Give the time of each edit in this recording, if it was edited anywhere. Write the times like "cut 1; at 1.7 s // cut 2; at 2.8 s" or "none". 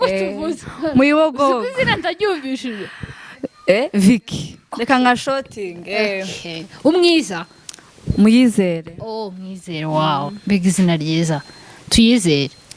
none